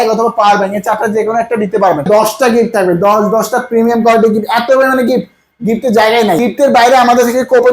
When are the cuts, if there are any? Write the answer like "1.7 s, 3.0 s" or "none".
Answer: 2.1 s, 6.4 s